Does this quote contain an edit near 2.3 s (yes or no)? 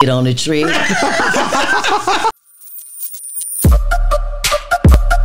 yes